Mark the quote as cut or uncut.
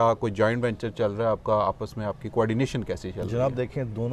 uncut